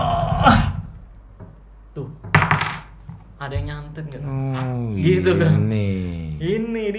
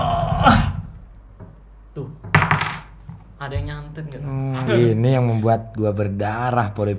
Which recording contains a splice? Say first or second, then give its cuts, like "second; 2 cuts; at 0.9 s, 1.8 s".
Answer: second; 1 cut; at 4.6 s